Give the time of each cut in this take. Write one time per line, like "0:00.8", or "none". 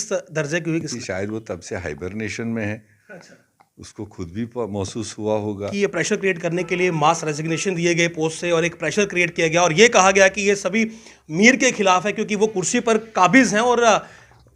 0:00.9
0:05.7